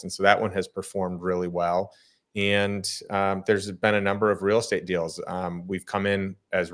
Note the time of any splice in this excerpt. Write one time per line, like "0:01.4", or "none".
none